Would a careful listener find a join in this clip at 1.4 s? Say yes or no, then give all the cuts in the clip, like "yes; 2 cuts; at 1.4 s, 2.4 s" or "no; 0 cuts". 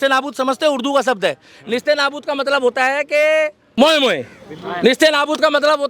no; 1 cut; at 3.6 s